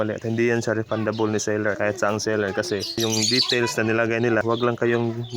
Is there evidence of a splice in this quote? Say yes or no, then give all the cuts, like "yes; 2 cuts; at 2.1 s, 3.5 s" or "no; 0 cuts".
yes; 3 cuts; at 1.8 s, 3.0 s, 4.4 s